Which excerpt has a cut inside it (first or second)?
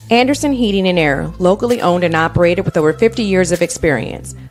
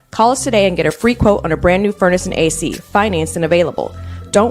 second